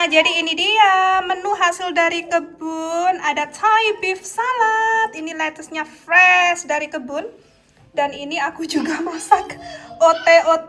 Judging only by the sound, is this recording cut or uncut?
uncut